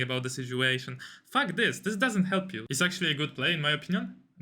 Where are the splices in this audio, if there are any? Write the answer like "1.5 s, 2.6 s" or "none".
2.6 s